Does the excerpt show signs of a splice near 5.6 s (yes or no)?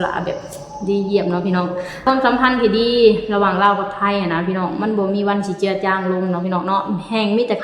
no